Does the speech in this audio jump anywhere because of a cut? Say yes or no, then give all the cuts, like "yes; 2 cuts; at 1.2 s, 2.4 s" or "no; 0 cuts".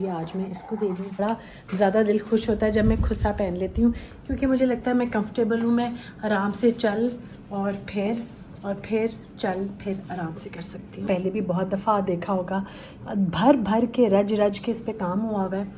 yes; 2 cuts; at 1.2 s, 11.1 s